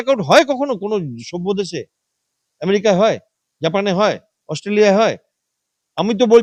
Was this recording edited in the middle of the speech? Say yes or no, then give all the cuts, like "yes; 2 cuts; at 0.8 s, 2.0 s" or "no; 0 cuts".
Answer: no; 0 cuts